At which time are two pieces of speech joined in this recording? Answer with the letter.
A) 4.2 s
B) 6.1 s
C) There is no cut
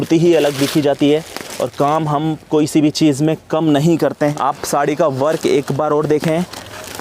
A